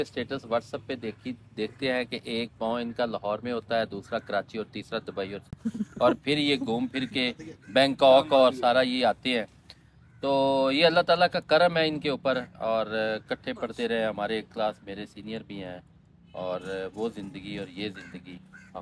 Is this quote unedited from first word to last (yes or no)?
yes